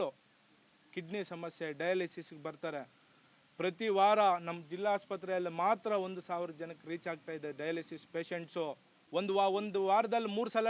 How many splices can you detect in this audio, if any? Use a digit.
1